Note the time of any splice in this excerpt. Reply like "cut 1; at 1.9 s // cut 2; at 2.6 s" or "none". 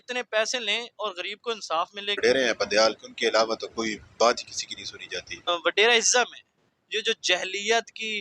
cut 1; at 2.2 s // cut 2; at 5.5 s